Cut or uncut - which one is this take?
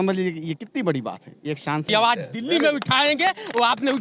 cut